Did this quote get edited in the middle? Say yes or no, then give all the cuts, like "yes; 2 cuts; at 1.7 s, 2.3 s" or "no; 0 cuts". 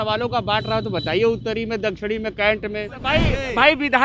yes; 1 cut; at 3.0 s